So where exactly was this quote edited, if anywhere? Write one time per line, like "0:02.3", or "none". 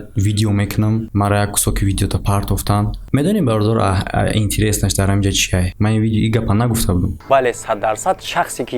0:05.7